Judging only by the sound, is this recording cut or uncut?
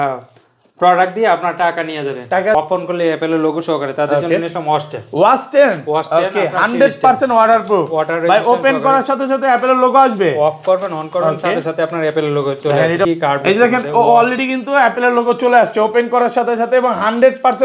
cut